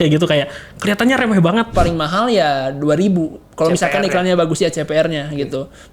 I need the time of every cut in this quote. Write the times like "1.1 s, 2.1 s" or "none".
1.7 s